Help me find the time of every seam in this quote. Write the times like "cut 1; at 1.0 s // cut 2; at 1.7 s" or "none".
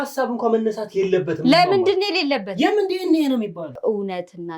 cut 1; at 3.7 s